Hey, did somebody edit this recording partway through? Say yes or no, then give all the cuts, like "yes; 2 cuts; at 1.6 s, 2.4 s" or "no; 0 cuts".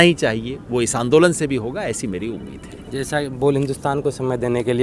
no; 0 cuts